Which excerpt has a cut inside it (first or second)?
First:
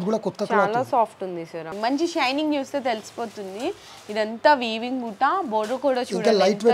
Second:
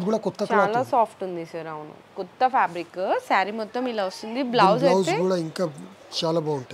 first